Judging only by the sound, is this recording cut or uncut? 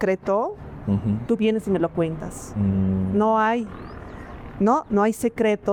uncut